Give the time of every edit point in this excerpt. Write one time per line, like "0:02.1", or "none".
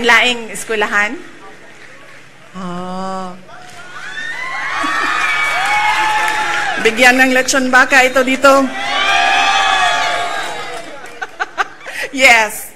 0:11.1